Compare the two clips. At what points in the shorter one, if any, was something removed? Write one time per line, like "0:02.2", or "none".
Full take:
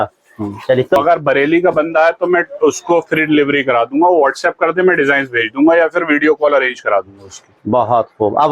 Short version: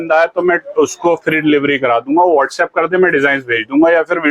none